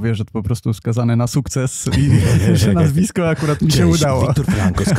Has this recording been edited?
no; 0 cuts

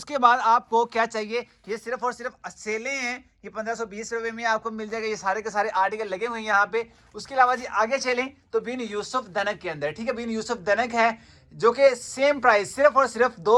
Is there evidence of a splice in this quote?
no; 0 cuts

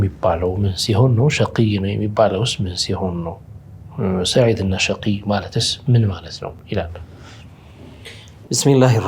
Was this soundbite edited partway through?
no; 0 cuts

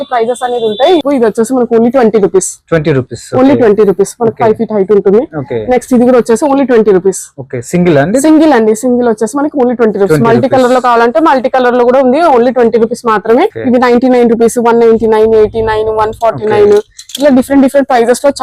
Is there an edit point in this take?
yes; 2 cuts; at 1.0 s, 13.6 s

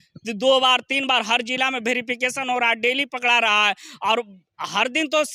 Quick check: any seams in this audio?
no; 0 cuts

